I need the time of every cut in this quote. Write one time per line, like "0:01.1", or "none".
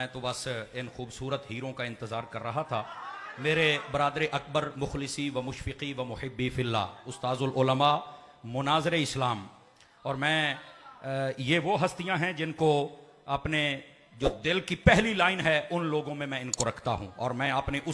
none